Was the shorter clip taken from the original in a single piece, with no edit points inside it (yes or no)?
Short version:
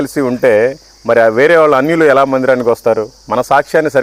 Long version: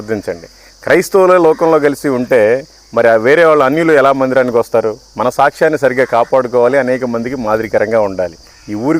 yes